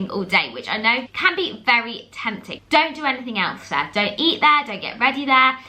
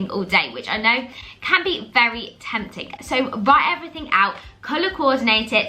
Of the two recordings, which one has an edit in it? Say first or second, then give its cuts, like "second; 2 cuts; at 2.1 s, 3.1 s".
first; 2 cuts; at 1.1 s, 2.5 s